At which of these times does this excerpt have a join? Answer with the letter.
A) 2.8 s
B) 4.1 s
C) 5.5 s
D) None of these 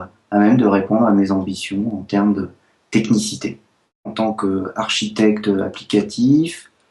B